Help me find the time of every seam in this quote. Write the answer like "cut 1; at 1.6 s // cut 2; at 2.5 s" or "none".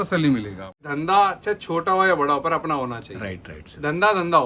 cut 1; at 0.9 s